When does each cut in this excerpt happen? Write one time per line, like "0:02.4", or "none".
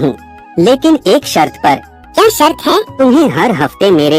0:02.0
0:02.9